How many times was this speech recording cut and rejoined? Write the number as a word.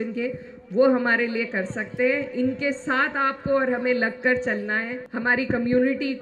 one